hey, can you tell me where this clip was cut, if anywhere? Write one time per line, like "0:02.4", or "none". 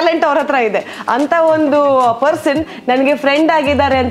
none